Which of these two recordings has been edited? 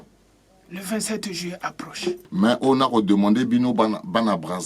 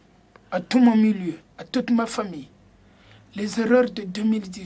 first; 1 cut; at 2.3 s

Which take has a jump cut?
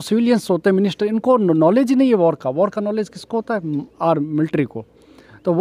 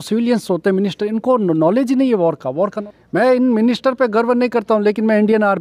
second; 1 cut; at 2.9 s

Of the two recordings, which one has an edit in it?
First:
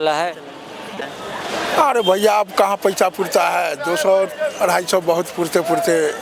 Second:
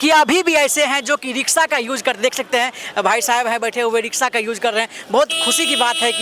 first; 1 cut; at 0.9 s

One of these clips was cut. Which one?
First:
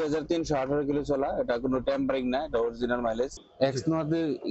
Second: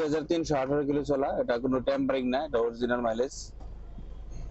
first; 1 cut; at 3.4 s

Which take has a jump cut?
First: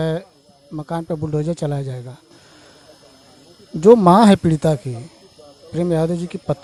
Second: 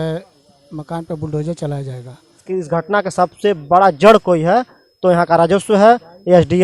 second; 1 cut; at 2.4 s

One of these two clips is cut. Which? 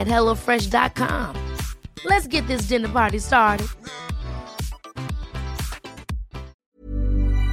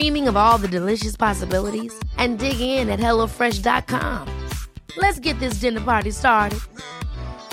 first; 1 cut; at 6.5 s

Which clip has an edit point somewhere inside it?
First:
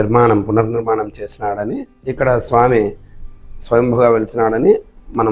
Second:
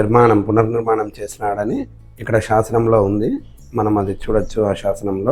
first; 1 cut; at 2.0 s

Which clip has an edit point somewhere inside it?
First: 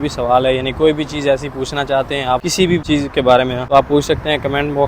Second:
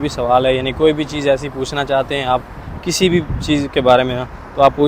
first; 2 cuts; at 2.8 s, 3.6 s

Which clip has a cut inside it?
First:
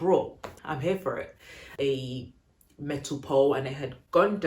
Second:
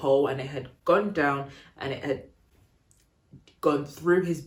first; 1 cut; at 1.7 s

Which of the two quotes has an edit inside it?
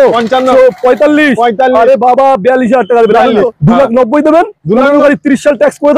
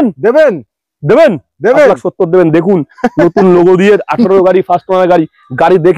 first; 1 cut; at 3.5 s

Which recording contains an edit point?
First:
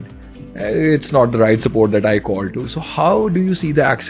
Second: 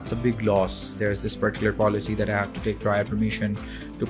second; 1 cut; at 1.0 s

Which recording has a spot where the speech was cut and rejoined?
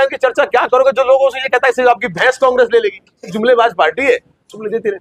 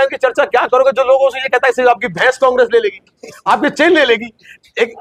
first; 1 cut; at 3.3 s

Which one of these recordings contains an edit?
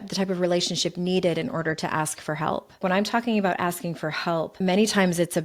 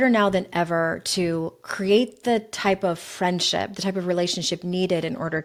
first; 2 cuts; at 2.8 s, 4.5 s

